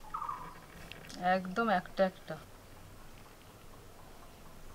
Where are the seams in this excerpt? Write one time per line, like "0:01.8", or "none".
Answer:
0:00.9
0:02.2